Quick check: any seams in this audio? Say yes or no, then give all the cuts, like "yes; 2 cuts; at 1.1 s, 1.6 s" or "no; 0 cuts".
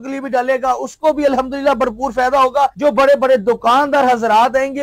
no; 0 cuts